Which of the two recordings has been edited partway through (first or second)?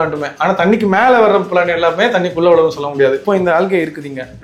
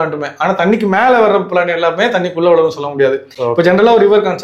first